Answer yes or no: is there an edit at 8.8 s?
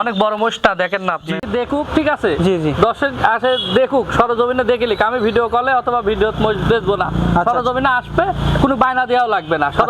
no